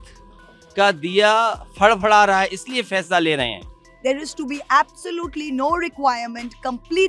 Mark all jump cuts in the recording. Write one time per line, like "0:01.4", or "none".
0:03.9